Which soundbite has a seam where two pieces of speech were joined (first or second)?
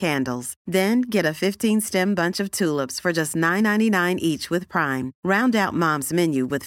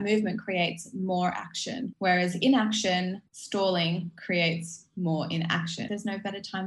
second